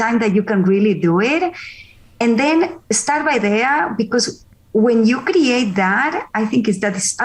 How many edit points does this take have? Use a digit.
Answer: 0